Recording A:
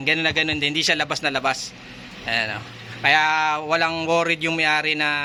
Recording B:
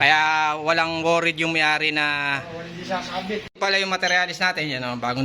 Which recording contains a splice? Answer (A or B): B